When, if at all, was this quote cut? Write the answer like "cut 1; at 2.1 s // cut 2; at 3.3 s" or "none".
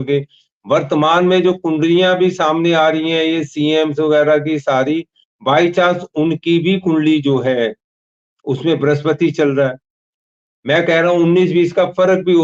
none